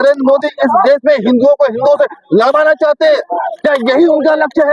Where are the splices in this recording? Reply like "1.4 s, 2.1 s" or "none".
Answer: none